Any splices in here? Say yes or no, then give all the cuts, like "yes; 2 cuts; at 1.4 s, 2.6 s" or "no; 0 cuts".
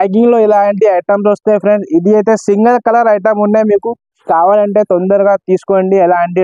no; 0 cuts